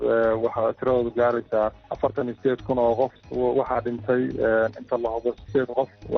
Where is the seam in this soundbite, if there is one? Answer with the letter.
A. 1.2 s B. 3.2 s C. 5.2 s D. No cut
B